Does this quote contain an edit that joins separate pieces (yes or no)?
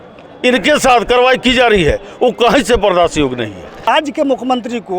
yes